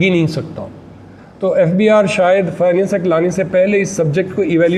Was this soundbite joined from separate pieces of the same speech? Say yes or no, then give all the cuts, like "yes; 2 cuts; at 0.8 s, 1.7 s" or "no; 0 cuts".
no; 0 cuts